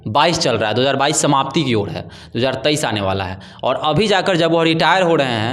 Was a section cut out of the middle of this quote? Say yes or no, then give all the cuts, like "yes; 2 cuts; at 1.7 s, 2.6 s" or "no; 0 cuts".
no; 0 cuts